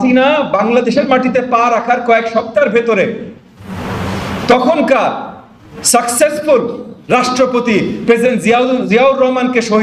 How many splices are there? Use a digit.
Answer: 0